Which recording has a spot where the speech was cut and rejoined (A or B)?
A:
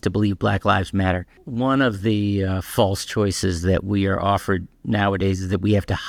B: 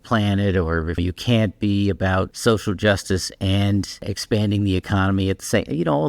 B